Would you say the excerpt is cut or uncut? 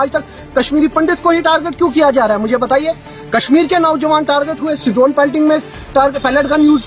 uncut